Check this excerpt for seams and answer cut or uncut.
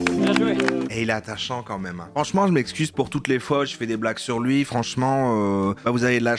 uncut